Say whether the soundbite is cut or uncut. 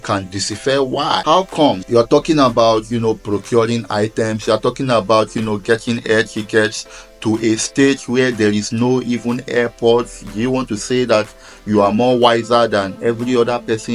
cut